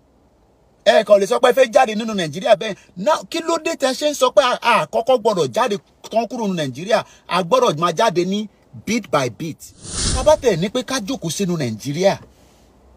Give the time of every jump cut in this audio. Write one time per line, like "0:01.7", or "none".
0:10.2